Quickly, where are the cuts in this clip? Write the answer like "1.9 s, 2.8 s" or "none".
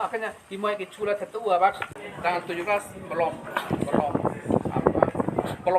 2.0 s